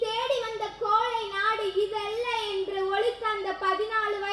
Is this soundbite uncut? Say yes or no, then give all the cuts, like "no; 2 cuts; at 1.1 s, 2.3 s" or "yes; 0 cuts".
yes; 0 cuts